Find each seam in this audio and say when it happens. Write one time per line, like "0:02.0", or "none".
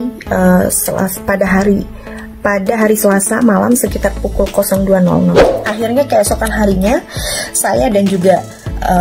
0:05.5